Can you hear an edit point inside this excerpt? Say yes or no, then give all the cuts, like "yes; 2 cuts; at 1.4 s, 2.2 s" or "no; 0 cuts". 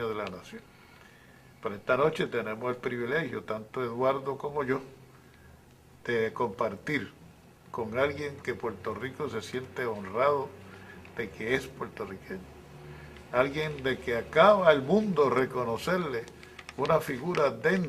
yes; 1 cut; at 2.9 s